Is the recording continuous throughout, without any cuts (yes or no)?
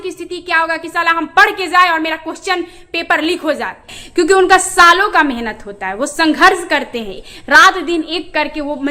no